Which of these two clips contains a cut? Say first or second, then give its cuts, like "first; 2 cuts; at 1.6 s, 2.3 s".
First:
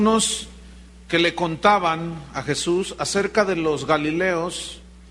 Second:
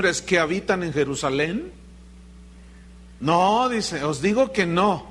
second; 1 cut; at 3.1 s